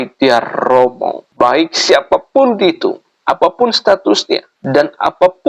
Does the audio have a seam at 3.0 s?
no; 2 cuts; at 1.2 s, 4.5 s

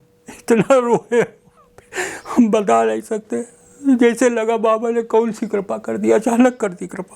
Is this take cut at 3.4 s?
no; 0 cuts

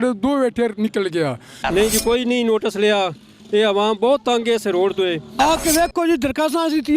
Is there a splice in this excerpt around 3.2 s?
no; 2 cuts; at 1.5 s, 5.2 s

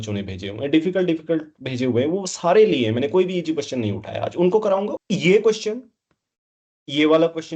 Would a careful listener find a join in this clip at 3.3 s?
no; 1 cut; at 5.0 s

